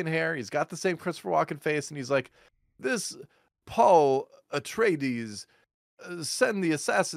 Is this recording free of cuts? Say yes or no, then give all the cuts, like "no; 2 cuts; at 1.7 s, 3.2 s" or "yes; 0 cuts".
yes; 0 cuts